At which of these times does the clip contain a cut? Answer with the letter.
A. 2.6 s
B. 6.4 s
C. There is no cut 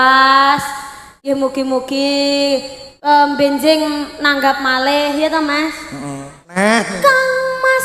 B